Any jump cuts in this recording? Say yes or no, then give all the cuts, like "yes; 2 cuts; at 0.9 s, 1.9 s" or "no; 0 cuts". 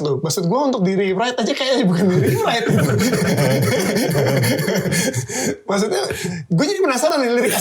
no; 0 cuts